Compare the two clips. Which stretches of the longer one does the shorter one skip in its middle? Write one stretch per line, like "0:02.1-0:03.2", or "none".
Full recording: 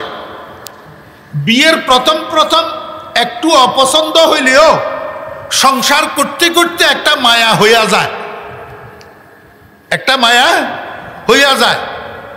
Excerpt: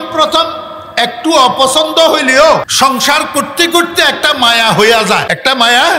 0:04.9-0:05.5
0:08.1-0:09.9